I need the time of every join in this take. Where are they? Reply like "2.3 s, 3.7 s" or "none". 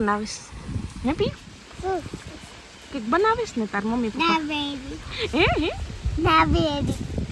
none